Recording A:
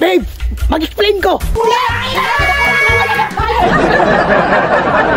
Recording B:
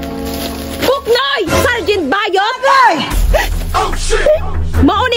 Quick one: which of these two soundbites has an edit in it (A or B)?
A